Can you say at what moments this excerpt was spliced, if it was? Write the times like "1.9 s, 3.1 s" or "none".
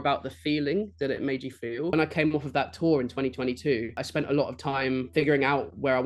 1.9 s, 4.0 s, 5.1 s